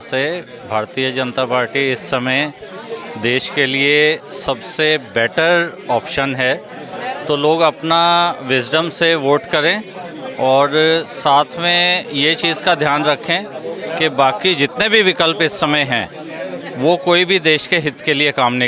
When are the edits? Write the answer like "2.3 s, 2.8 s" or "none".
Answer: none